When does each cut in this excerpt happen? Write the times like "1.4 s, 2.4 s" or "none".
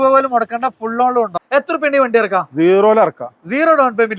1.3 s